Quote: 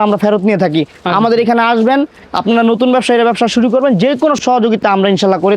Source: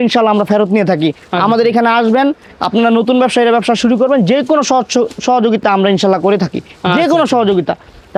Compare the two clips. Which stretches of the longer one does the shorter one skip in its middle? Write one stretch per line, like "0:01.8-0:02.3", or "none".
0:04.6-0:05.2